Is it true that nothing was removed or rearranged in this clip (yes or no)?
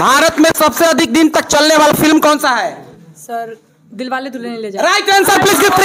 yes